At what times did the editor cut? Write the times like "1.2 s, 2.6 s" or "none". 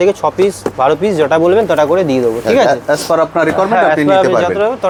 none